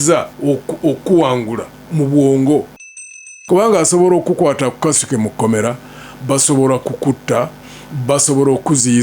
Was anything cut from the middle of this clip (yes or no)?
yes